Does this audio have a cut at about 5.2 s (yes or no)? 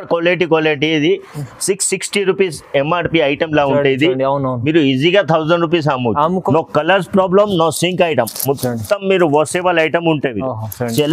no